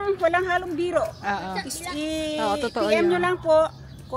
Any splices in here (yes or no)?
no